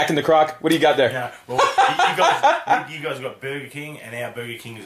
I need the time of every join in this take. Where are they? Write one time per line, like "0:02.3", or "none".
0:01.1